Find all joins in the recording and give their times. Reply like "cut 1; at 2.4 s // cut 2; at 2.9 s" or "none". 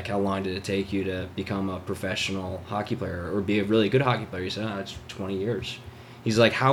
none

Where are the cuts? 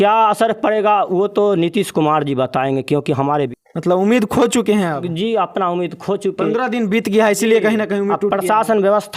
none

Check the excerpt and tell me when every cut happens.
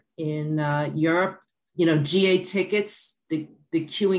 cut 1; at 1.5 s

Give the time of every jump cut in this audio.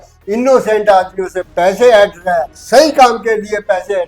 cut 1; at 2.5 s

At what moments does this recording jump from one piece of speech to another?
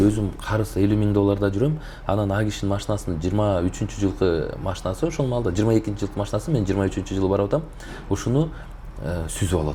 none

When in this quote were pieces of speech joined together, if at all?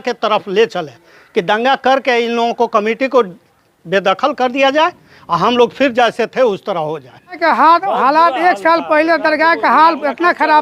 cut 1; at 7.4 s

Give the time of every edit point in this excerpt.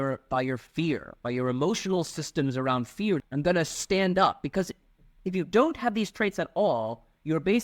cut 1; at 3.3 s

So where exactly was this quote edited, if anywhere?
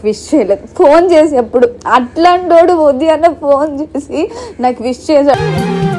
none

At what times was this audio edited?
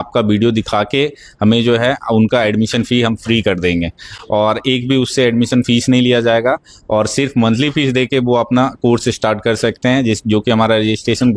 none

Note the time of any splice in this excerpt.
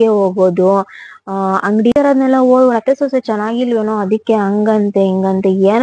cut 1; at 1.9 s

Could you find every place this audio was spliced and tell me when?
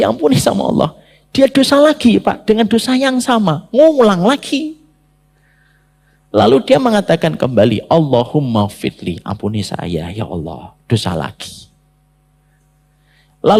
none

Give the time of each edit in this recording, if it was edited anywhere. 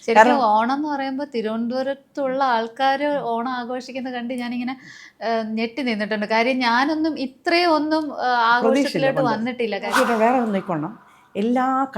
cut 1; at 9.9 s

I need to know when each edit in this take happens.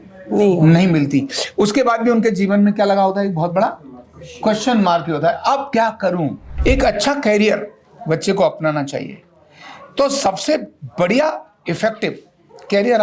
cut 1; at 6.5 s

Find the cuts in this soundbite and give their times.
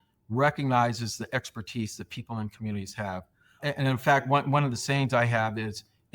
cut 1; at 3.6 s

